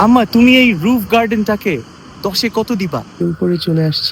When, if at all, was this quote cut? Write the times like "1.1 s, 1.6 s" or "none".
3.2 s